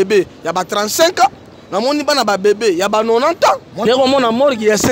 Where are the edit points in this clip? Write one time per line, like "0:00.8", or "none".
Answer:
0:03.7